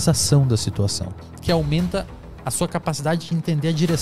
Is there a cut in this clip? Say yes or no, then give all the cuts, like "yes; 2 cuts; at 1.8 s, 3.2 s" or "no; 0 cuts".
yes; 1 cut; at 1.3 s